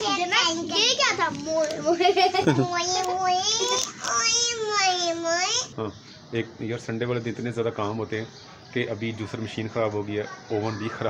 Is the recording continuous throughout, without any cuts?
no; 1 cut; at 5.6 s

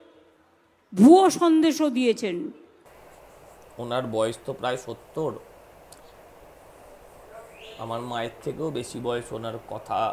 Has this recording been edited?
no; 0 cuts

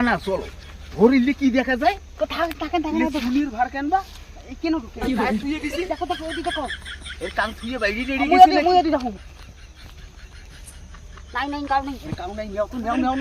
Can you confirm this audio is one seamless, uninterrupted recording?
yes; 0 cuts

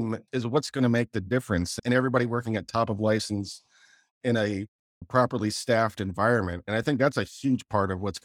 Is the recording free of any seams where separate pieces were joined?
no; 1 cut; at 1.8 s

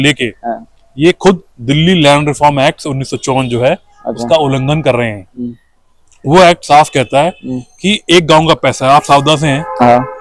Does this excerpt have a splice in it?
no; 0 cuts

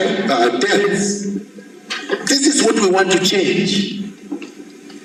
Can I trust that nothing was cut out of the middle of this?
yes; 0 cuts

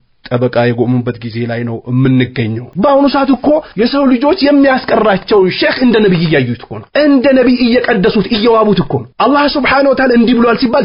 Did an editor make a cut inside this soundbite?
yes; 1 cut; at 2.7 s

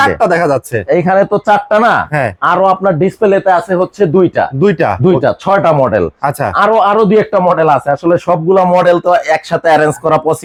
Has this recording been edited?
no; 0 cuts

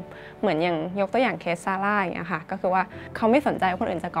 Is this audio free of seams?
yes; 0 cuts

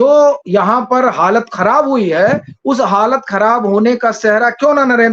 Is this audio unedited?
yes; 0 cuts

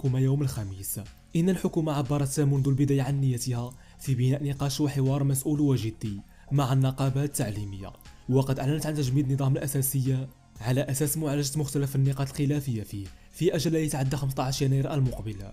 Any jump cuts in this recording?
no; 0 cuts

